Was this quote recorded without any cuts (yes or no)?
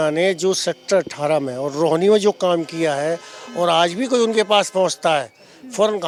yes